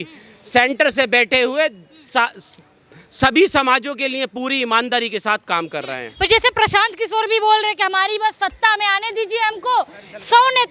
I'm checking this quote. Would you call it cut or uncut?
uncut